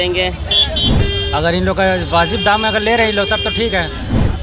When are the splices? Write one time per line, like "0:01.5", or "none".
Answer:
0:01.0